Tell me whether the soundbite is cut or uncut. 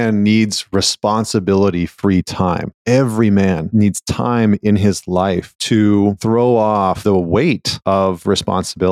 cut